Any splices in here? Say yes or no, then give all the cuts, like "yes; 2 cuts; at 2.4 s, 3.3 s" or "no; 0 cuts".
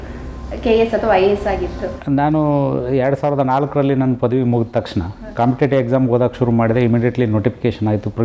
no; 0 cuts